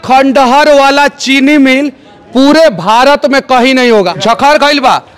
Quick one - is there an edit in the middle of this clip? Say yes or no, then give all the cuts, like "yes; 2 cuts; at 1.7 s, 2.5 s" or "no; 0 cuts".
yes; 1 cut; at 4.1 s